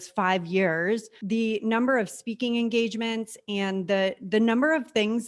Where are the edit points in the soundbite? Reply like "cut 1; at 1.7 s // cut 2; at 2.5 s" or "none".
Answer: cut 1; at 1.1 s

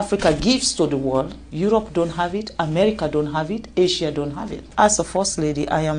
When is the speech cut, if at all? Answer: cut 1; at 1.4 s // cut 2; at 4.7 s

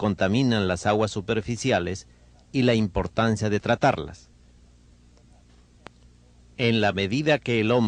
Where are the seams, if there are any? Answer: cut 1; at 6.8 s

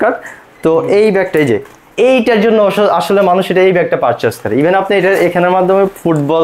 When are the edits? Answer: none

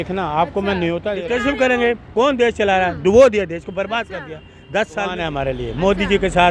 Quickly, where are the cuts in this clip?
cut 1; at 1.1 s // cut 2; at 5.2 s

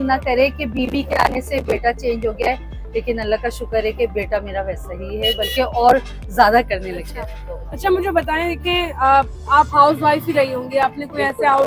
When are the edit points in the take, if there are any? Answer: none

